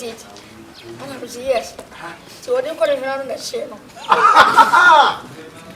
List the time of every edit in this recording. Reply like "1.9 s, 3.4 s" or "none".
none